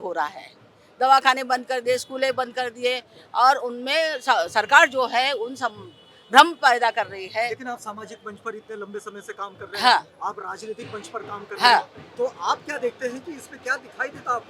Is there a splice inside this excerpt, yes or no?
no